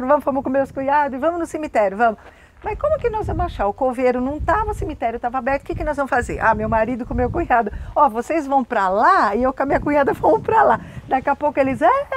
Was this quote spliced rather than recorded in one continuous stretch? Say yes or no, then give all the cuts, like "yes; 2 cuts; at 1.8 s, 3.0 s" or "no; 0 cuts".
no; 0 cuts